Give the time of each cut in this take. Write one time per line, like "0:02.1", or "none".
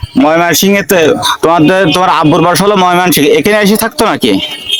none